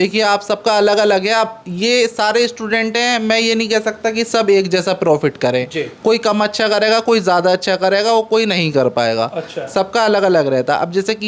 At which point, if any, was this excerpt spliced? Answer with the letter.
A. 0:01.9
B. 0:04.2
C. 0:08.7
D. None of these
D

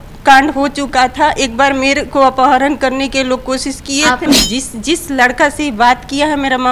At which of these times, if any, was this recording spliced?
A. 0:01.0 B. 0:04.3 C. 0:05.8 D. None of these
B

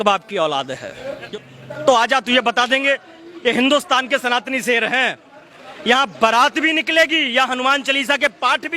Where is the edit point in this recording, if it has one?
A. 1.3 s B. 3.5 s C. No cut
A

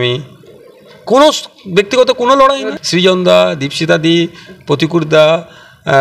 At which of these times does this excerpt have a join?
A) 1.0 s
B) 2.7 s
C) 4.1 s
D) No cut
B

